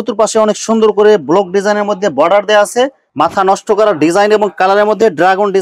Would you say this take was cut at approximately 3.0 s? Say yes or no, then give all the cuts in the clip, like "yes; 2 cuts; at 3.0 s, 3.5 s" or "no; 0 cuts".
yes; 1 cut; at 3.0 s